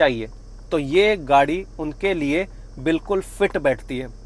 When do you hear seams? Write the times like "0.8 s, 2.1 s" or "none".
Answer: none